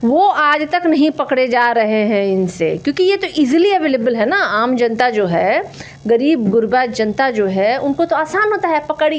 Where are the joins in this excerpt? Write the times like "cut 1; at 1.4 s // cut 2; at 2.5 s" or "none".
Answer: none